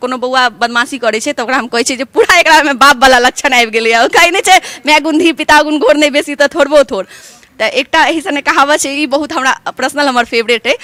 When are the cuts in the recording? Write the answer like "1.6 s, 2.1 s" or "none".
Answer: none